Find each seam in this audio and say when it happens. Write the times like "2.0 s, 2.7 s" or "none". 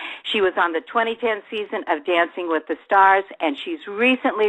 1.4 s